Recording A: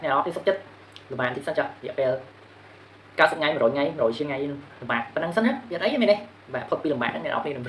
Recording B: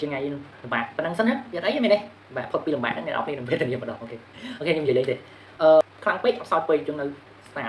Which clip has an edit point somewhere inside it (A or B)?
B